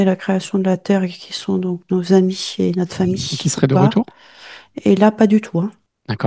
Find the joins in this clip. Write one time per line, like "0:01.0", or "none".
none

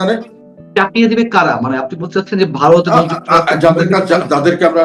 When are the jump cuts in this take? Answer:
0:00.9

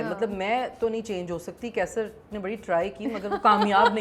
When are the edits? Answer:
none

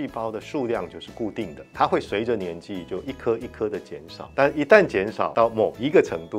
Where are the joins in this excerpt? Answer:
0:01.6
0:04.1
0:05.3

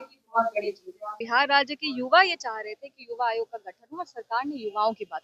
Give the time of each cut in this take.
0:01.1

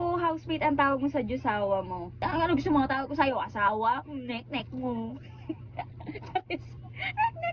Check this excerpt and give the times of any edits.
0:02.2

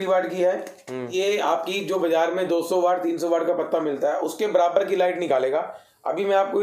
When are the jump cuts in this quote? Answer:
0:01.1

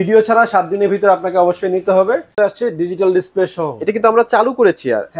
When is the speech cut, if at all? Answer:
0:02.4

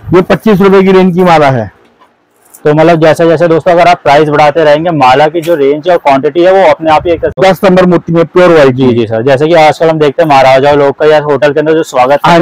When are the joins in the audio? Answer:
0:07.3

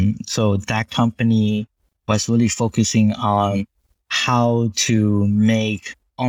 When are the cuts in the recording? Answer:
none

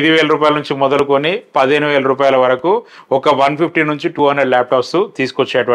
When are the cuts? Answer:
none

